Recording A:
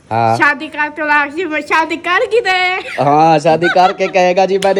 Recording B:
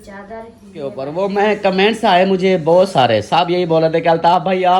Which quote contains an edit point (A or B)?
B